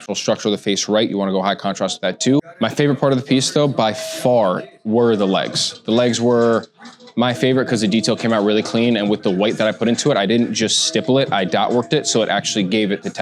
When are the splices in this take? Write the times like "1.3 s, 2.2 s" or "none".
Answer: none